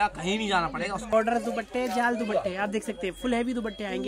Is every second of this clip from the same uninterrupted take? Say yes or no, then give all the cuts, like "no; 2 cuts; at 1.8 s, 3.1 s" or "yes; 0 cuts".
no; 1 cut; at 1.1 s